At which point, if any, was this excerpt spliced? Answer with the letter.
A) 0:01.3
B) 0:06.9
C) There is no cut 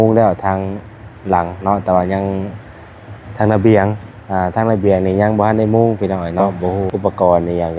B